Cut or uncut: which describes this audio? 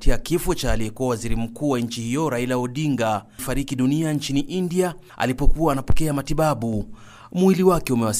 uncut